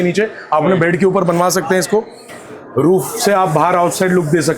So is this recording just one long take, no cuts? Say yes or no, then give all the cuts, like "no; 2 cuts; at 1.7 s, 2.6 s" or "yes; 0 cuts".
yes; 0 cuts